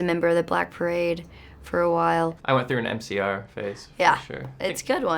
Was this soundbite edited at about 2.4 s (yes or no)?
yes